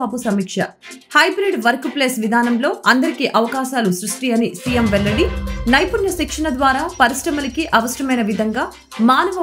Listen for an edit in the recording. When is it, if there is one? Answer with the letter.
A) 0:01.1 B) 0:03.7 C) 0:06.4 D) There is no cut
D